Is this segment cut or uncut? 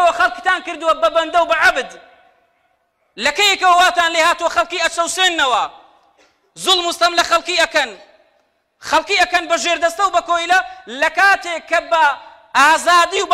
uncut